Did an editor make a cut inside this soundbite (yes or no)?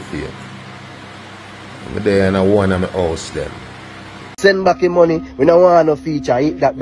yes